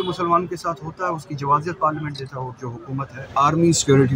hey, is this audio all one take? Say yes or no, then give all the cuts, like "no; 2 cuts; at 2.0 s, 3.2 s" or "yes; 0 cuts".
no; 1 cut; at 3.2 s